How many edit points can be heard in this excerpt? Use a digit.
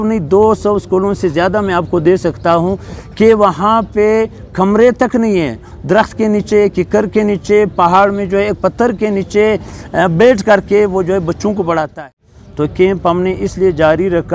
1